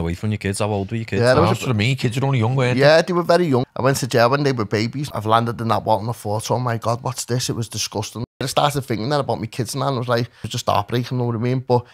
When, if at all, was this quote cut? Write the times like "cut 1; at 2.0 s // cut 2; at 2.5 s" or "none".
cut 1; at 3.7 s // cut 2; at 5.0 s // cut 3; at 8.5 s // cut 4; at 10.4 s